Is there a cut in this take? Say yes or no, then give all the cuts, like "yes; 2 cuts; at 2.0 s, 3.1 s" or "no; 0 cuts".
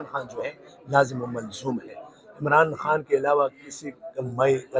no; 0 cuts